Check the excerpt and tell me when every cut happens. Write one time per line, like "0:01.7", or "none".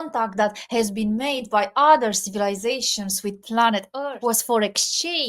0:04.0